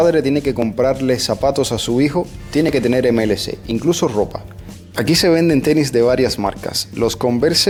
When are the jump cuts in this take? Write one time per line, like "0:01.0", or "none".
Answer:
none